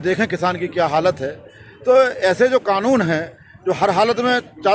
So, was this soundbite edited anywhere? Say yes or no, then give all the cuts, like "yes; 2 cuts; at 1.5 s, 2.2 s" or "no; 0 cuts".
no; 0 cuts